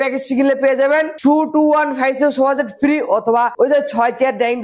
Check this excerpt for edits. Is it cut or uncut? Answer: cut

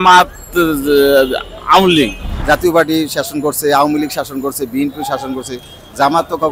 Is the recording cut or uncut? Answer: cut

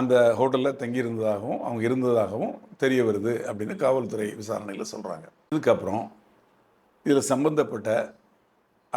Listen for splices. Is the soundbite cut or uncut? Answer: uncut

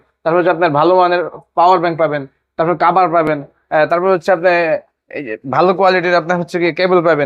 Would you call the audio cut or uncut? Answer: uncut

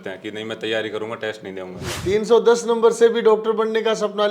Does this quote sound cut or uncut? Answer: cut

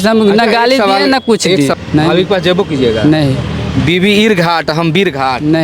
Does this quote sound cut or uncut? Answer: cut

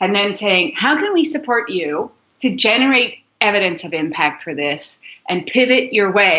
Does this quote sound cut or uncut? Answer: uncut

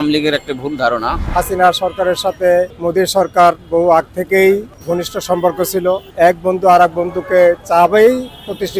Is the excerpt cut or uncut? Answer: cut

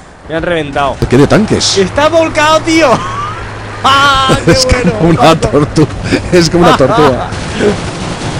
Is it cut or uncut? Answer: cut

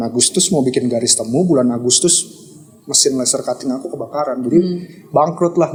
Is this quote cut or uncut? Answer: uncut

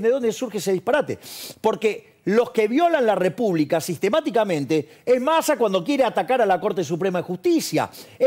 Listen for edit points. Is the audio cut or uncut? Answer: uncut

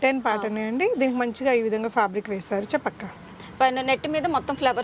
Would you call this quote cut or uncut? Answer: uncut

